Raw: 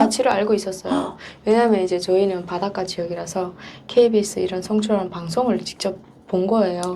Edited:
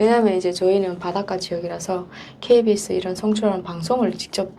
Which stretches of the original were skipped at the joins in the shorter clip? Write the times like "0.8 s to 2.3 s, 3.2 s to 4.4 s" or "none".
none